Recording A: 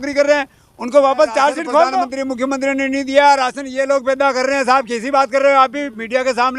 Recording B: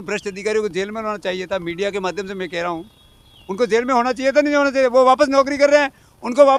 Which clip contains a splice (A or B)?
A